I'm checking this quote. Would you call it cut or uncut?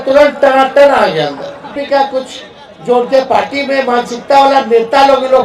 cut